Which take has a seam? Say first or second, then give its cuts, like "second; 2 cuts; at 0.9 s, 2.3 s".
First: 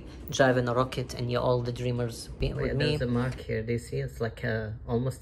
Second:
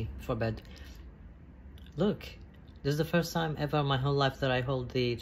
first; 1 cut; at 3.0 s